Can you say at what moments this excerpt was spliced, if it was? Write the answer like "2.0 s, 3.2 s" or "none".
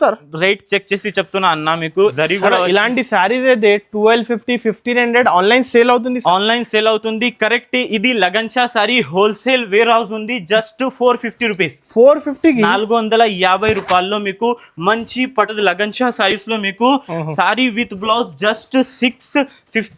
2.1 s, 15.5 s